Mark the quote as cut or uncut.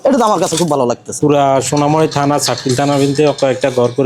cut